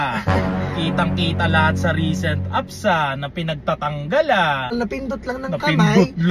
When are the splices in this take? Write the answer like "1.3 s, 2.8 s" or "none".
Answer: 4.7 s